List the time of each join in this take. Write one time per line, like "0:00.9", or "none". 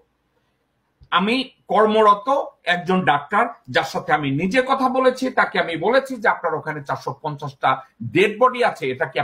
none